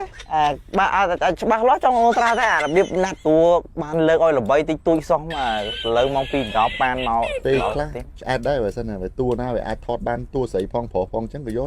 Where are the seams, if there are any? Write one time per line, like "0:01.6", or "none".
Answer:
0:03.2

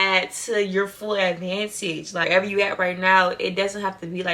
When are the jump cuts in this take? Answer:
0:02.2

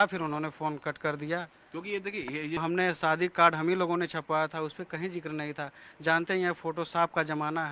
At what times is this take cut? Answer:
0:02.6

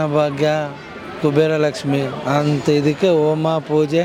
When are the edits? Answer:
none

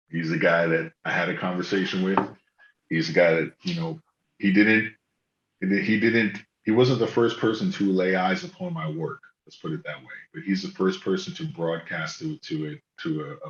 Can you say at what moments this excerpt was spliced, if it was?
none

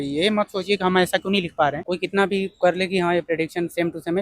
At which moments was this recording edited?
0:01.8

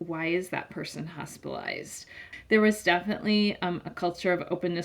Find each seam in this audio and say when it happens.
0:02.3

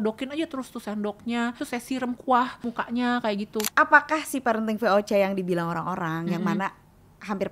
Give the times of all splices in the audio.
0:01.6
0:02.6
0:03.7

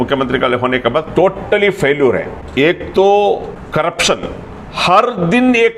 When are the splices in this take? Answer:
none

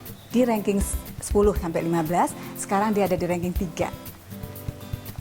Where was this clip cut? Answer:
0:03.9

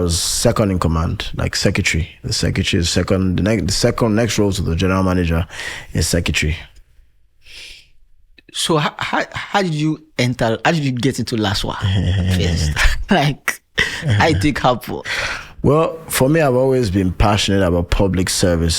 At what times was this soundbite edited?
none

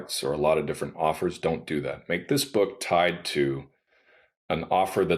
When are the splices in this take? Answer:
none

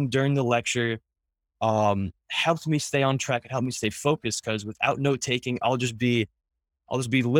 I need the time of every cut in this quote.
none

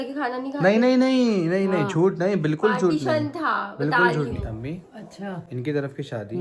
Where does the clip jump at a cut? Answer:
none

